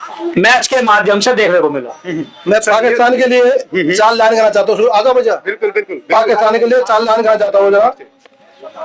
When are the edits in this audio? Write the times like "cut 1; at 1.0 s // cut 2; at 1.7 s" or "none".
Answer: none